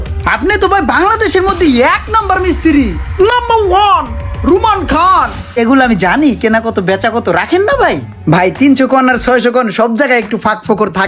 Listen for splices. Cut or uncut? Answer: cut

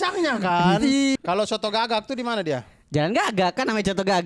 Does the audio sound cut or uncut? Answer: cut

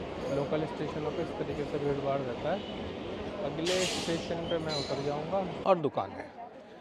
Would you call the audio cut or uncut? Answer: cut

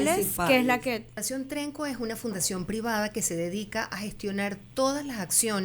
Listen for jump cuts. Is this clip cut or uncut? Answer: cut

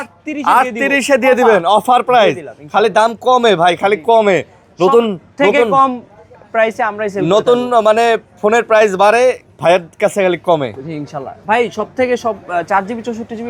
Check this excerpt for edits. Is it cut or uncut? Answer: uncut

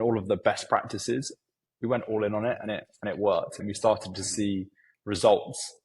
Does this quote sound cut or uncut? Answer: cut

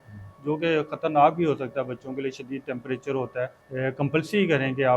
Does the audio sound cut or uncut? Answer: cut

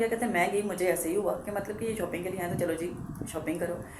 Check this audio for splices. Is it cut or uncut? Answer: uncut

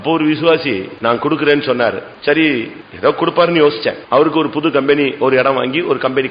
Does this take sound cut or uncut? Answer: cut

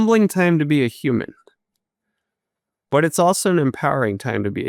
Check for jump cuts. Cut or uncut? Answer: uncut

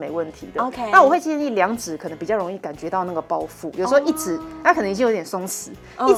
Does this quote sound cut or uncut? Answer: uncut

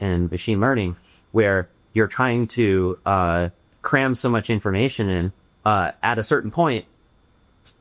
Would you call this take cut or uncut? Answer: uncut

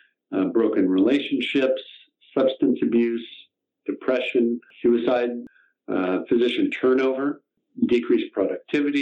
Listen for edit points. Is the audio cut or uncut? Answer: cut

